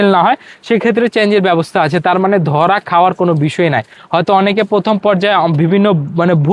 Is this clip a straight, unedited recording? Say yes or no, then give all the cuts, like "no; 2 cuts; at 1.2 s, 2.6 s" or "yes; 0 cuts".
yes; 0 cuts